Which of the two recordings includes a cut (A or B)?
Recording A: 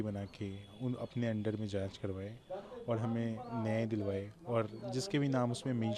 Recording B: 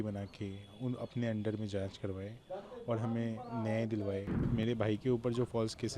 B